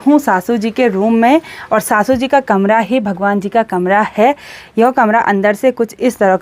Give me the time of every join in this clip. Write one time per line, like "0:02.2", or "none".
none